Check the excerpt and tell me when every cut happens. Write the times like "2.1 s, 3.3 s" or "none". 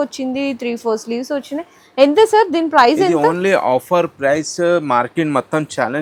none